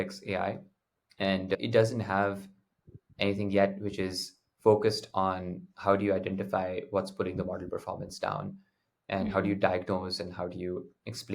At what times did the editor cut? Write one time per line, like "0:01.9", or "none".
0:01.6